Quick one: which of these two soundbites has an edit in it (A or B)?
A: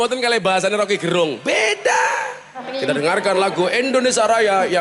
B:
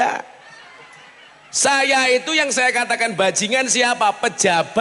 A